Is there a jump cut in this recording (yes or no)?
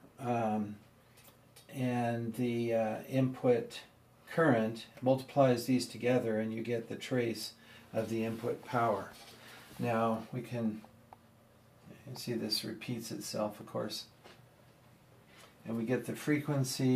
no